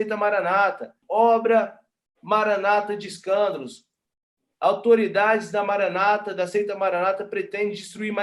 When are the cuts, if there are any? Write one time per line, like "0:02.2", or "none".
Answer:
0:01.0
0:03.8